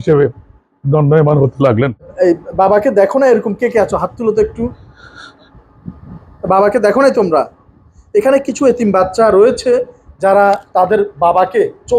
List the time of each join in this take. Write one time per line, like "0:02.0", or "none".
0:02.1

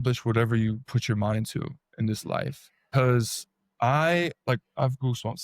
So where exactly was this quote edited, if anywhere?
0:02.9

